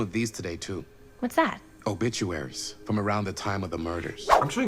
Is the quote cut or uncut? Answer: uncut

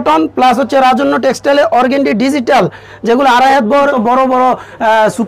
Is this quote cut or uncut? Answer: cut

